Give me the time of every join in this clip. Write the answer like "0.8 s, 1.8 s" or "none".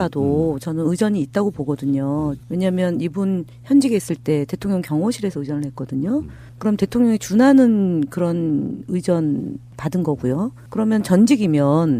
6.9 s